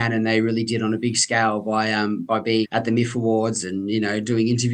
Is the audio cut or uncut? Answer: cut